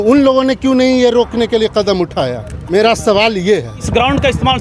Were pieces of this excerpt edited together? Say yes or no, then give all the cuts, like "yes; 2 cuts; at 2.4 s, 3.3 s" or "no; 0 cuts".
yes; 2 cuts; at 2.5 s, 3.8 s